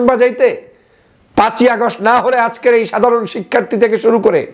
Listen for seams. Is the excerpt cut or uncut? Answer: uncut